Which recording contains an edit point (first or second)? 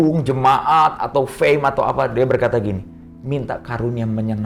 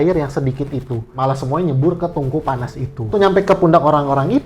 second